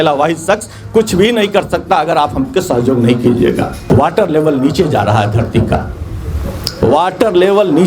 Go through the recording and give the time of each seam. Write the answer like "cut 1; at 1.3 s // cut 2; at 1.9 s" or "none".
cut 1; at 3.8 s